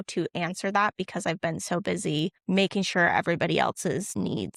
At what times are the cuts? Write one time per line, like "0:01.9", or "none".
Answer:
none